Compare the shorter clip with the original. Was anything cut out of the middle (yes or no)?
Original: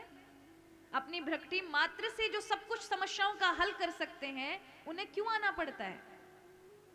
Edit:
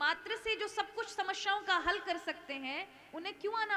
no